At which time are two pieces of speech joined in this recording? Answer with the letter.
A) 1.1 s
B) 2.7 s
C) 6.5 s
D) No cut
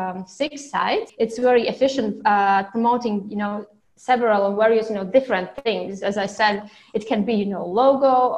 A